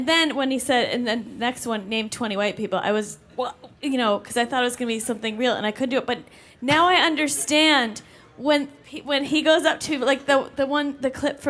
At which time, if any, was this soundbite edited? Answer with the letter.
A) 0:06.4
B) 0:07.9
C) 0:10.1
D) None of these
B